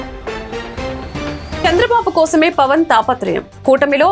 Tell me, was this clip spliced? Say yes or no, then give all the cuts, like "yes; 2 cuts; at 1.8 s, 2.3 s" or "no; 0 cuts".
no; 0 cuts